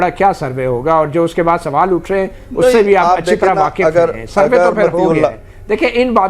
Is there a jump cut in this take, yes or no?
no